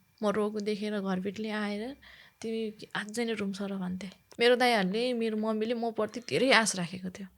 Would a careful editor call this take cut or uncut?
cut